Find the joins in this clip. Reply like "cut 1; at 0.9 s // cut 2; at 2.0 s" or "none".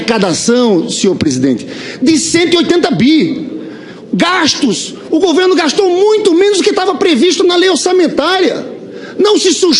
cut 1; at 2.6 s